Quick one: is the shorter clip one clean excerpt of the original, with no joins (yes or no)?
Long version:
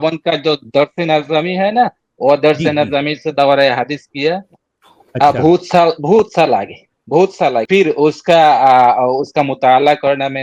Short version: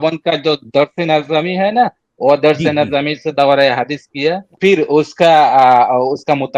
no